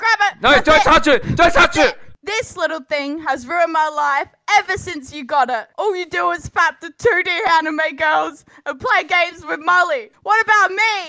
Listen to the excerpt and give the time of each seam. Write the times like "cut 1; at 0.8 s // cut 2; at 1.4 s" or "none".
cut 1; at 2.1 s // cut 2; at 10.1 s